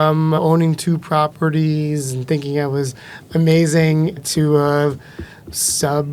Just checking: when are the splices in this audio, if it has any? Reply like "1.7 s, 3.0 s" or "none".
none